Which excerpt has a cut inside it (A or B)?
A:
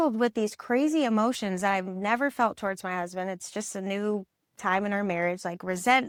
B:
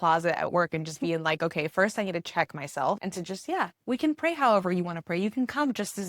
B